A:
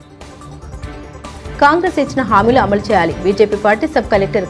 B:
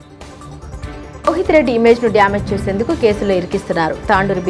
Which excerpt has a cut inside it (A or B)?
A